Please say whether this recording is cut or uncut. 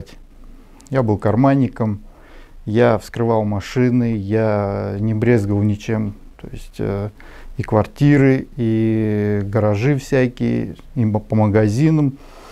uncut